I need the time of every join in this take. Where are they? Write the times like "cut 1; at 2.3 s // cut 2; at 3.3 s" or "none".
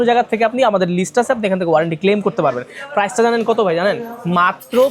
none